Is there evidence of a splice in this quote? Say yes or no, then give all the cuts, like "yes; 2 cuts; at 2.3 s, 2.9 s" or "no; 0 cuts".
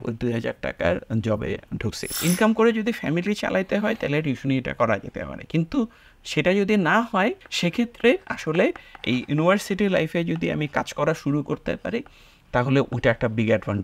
yes; 2 cuts; at 2.1 s, 7.5 s